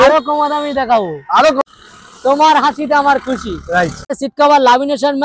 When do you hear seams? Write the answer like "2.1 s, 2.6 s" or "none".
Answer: 1.6 s, 4.2 s